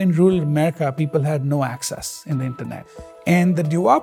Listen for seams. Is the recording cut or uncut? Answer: cut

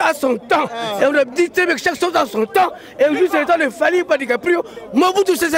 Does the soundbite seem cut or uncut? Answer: uncut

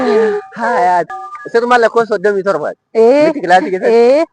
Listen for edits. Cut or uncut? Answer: cut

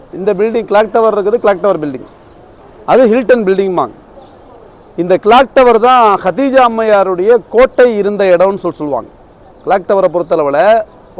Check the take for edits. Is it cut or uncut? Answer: uncut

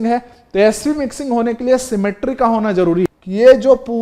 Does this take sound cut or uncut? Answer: cut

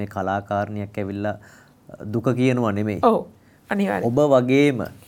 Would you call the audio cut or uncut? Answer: uncut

